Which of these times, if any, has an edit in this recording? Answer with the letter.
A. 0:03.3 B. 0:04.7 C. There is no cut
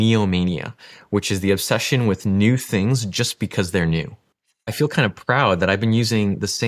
B